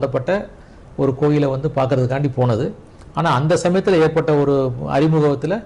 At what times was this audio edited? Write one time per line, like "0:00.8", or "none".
none